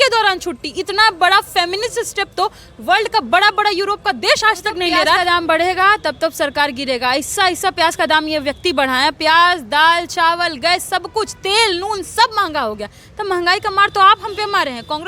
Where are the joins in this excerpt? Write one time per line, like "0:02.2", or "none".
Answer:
0:05.2